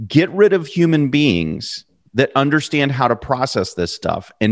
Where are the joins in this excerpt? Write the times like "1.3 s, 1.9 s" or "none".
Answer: none